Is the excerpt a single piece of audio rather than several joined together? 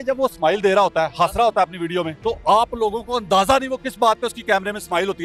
no; 1 cut; at 2.1 s

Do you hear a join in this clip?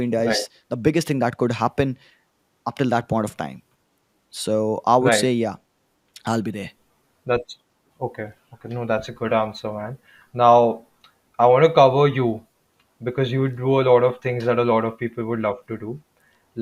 no; 0 cuts

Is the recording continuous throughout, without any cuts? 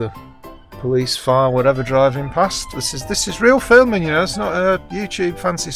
yes; 0 cuts

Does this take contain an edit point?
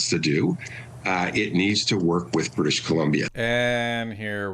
yes; 1 cut; at 3.3 s

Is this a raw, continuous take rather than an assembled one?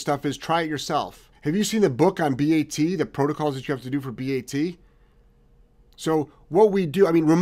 no; 1 cut; at 1.2 s

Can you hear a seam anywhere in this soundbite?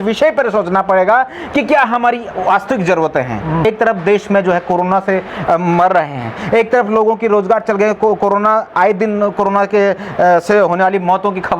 yes; 1 cut; at 3.7 s

